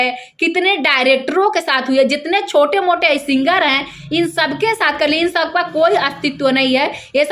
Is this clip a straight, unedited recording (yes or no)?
yes